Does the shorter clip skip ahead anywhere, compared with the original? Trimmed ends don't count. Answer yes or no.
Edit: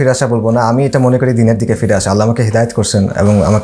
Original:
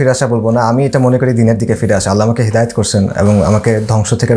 no